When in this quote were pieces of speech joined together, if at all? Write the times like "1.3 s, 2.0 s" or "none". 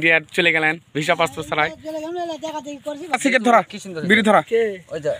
3.1 s